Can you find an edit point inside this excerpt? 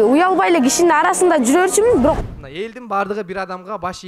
yes; 1 cut; at 2.2 s

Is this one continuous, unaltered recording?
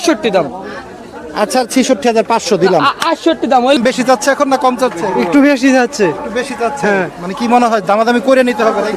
no; 1 cut; at 3.8 s

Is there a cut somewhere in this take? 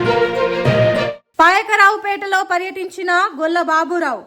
yes; 1 cut; at 1.2 s

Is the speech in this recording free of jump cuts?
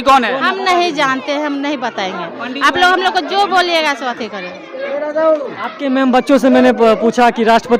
yes; 0 cuts

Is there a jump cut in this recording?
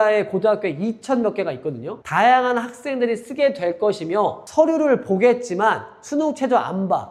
no; 0 cuts

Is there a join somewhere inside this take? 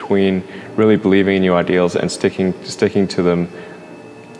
no; 0 cuts

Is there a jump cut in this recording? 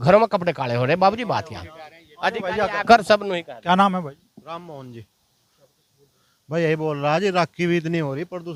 no; 0 cuts

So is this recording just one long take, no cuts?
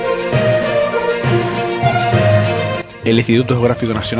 no; 1 cut; at 2.8 s

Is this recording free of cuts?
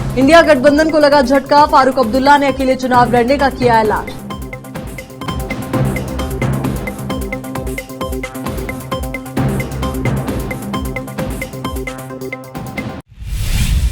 no; 1 cut; at 13.0 s

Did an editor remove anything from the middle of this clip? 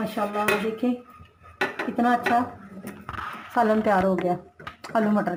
no; 0 cuts

